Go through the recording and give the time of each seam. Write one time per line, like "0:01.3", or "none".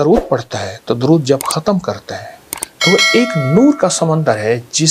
none